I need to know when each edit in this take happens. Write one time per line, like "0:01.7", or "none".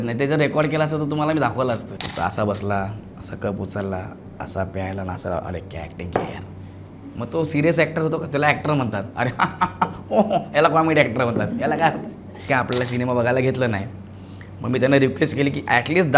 0:02.0
0:12.4

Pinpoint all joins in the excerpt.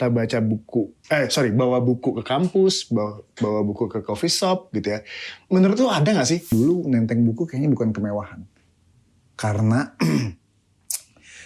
0:06.5

